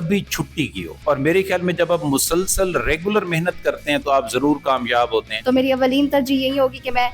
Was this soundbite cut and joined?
yes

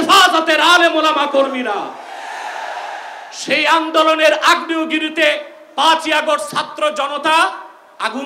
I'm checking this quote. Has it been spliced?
no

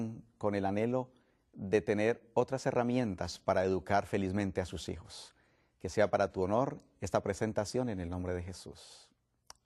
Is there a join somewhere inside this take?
no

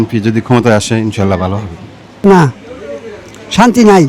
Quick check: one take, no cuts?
no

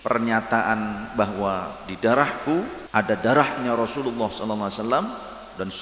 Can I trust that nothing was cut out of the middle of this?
no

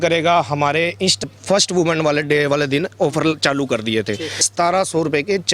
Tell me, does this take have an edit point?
yes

